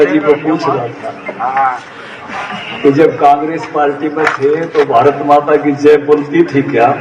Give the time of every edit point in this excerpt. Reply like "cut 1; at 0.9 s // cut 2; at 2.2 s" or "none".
none